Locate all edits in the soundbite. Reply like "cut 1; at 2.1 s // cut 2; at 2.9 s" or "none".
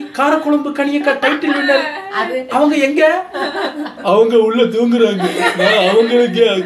none